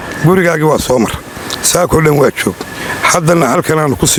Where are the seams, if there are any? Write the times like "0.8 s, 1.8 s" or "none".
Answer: none